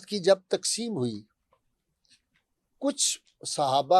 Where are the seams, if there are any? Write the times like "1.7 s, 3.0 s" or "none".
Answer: none